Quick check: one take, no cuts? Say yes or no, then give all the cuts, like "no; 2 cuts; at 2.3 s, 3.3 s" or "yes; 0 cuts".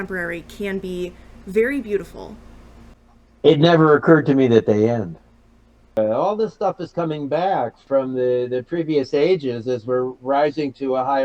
no; 2 cuts; at 6.0 s, 7.8 s